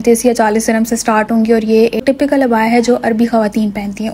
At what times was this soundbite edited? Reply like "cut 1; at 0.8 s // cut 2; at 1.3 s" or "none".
cut 1; at 2.0 s